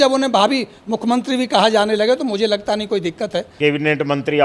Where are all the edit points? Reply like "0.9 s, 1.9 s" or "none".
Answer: 3.5 s

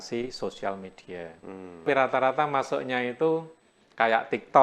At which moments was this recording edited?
1.8 s

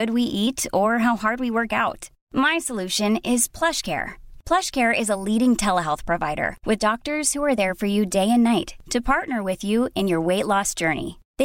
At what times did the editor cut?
none

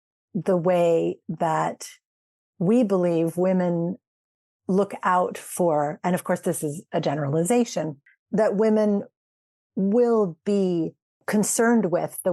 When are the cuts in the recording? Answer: 8.0 s

